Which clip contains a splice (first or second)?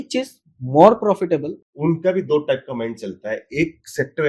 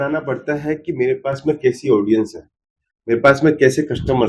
first